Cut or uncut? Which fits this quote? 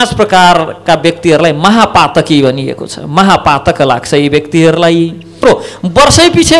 cut